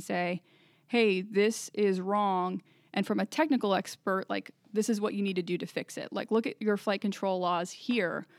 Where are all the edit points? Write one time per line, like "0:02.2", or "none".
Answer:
none